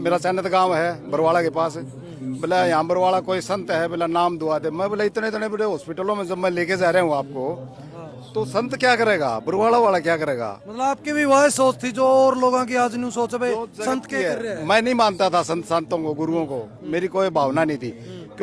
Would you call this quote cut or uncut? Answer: uncut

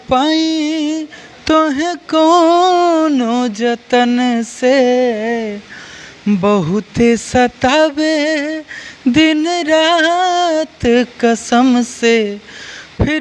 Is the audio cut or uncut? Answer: uncut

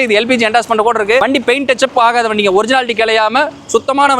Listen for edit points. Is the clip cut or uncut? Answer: uncut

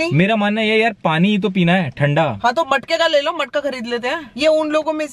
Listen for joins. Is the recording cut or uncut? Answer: cut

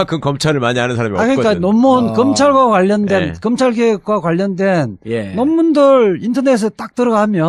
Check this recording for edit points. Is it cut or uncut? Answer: uncut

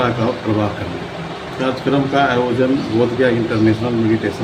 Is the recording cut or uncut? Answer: cut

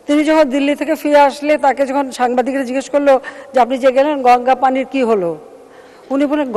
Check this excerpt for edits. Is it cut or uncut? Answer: uncut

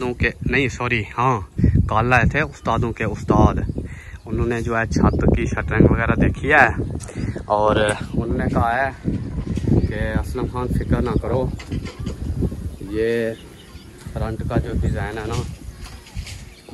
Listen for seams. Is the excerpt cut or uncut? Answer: uncut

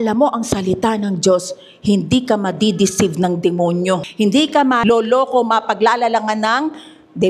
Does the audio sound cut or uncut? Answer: cut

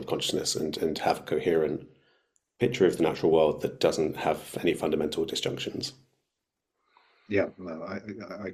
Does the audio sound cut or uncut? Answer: uncut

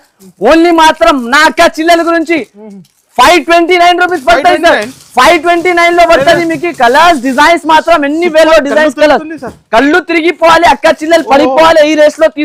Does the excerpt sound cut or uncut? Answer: uncut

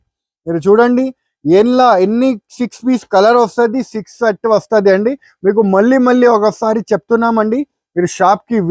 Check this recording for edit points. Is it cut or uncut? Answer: uncut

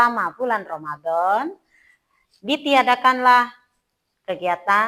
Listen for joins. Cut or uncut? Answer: uncut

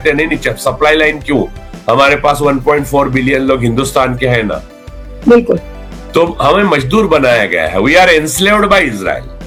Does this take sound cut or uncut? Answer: uncut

